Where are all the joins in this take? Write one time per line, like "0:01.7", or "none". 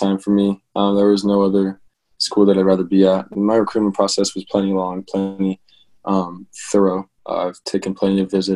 none

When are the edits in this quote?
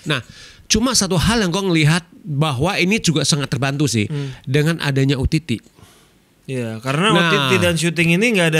none

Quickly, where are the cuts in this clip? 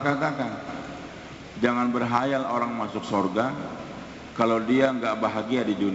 none

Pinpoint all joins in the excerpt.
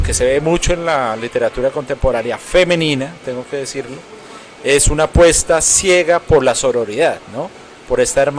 none

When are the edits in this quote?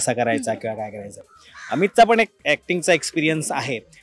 none

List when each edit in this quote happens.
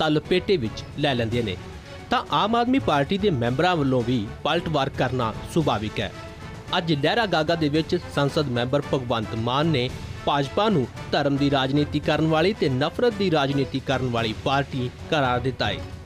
0:08.6

